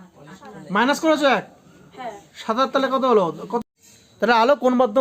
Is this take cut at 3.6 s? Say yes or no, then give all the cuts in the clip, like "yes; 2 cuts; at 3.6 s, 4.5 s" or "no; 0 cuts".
yes; 1 cut; at 3.6 s